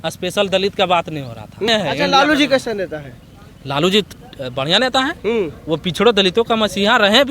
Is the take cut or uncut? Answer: cut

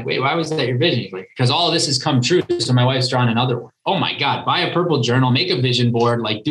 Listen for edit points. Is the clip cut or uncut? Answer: cut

